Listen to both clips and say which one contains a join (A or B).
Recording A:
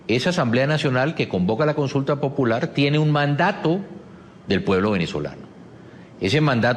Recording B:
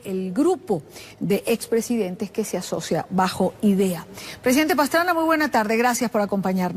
B